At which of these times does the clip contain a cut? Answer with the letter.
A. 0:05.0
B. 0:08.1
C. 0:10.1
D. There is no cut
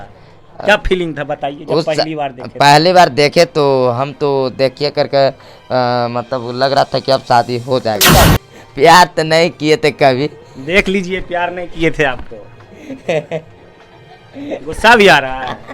B